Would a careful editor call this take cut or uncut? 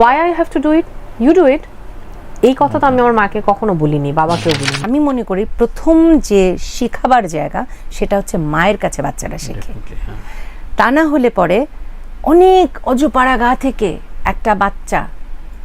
cut